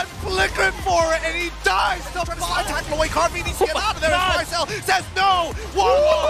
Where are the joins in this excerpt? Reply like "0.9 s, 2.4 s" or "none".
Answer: 2.4 s